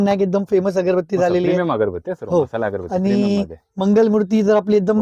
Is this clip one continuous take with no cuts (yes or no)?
yes